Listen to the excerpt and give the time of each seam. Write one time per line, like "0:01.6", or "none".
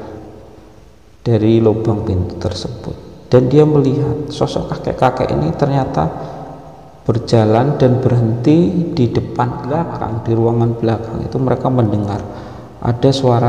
0:09.9